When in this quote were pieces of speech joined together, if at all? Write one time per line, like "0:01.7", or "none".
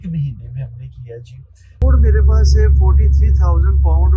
0:01.7